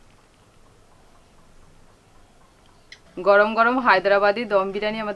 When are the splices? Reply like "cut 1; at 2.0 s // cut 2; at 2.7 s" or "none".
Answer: none